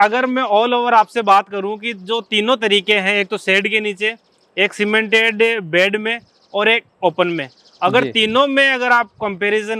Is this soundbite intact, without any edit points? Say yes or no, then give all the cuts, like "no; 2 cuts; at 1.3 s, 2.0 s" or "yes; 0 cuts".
yes; 0 cuts